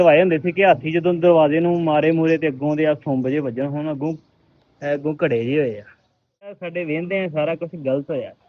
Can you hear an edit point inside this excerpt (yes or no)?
yes